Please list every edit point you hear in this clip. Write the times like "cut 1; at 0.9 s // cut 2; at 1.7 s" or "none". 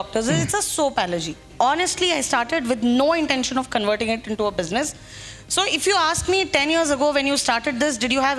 cut 1; at 1.5 s